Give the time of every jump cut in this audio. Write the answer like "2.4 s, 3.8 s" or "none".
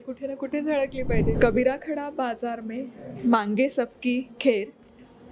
1.4 s